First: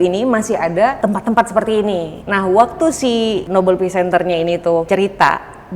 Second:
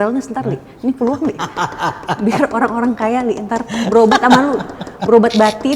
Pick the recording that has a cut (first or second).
first